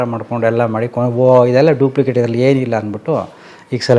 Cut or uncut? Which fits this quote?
uncut